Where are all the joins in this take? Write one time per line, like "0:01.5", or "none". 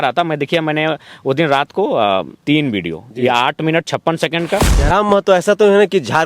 0:02.3
0:04.7